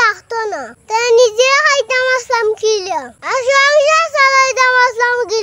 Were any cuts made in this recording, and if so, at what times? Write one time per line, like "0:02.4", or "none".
none

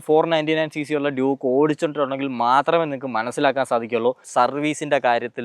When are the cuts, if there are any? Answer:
0:04.3

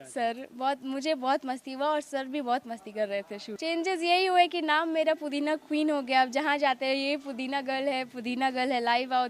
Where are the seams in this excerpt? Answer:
0:03.5

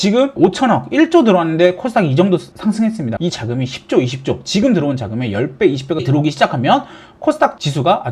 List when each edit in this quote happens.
0:03.1
0:06.1

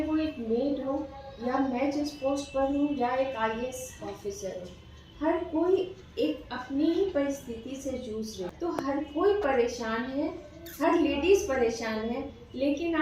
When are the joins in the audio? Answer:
0:08.5

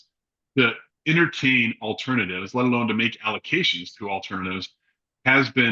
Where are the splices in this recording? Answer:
none

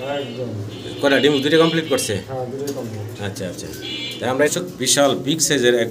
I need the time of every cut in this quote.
0:04.5

